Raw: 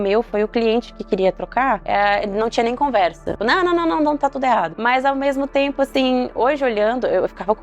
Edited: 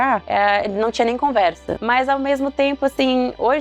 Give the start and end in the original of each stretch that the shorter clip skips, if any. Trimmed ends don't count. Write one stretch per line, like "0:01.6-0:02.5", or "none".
0:03.3-0:04.7